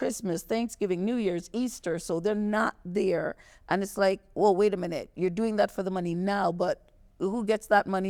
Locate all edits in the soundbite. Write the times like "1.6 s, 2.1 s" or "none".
none